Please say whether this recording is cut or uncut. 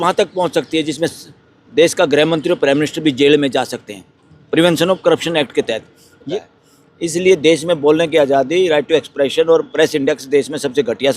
cut